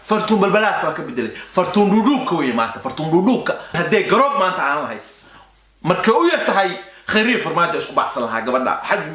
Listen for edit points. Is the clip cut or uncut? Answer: cut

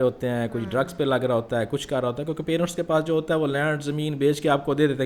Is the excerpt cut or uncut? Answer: uncut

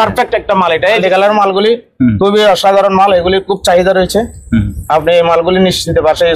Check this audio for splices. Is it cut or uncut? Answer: cut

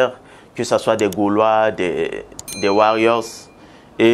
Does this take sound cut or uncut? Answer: uncut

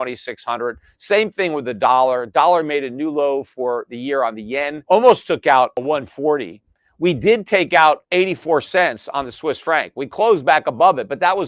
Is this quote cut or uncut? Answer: cut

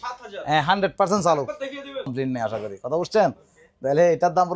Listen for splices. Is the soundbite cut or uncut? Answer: cut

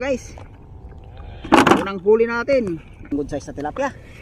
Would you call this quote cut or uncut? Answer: cut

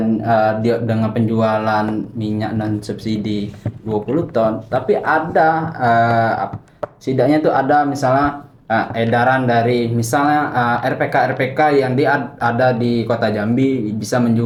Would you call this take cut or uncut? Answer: uncut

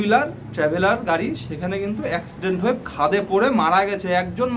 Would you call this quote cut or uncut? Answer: uncut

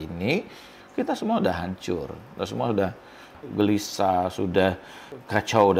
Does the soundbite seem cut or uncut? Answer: cut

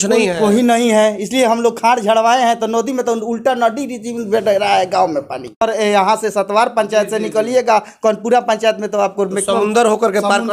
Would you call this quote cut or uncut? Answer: cut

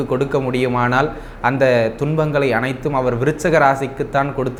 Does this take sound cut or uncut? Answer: uncut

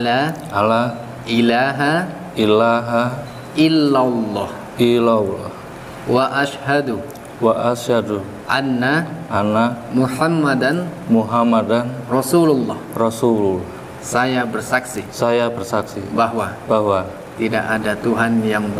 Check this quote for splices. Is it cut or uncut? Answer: uncut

